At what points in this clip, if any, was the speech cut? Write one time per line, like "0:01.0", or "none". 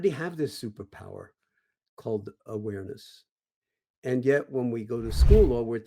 0:02.4